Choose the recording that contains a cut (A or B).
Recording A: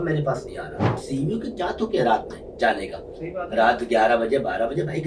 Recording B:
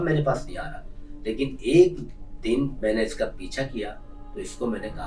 A